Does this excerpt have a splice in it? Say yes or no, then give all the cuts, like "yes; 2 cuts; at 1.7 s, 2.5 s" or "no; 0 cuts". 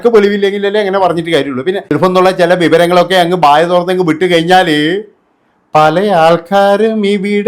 yes; 1 cut; at 1.9 s